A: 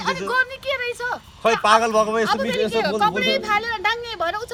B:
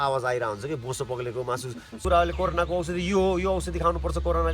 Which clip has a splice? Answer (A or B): B